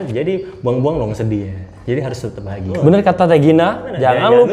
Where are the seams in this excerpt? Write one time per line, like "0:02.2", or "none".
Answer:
0:02.8